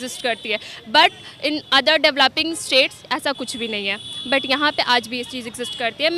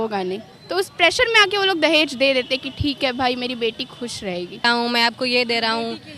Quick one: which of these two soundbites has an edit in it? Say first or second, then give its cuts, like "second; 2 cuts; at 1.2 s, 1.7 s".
second; 1 cut; at 4.6 s